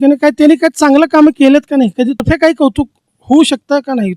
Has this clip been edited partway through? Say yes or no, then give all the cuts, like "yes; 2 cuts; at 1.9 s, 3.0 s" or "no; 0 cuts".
yes; 1 cut; at 2.2 s